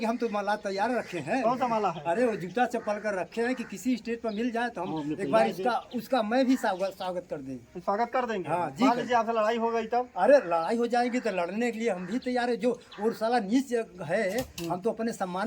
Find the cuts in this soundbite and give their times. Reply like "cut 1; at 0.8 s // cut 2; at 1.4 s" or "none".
none

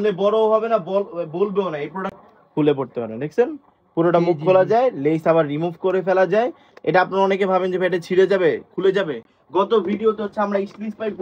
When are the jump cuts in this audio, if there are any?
cut 1; at 2.1 s // cut 2; at 9.4 s

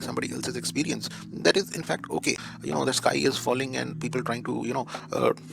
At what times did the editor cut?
cut 1; at 2.5 s

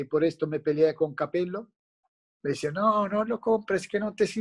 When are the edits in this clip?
cut 1; at 2.3 s

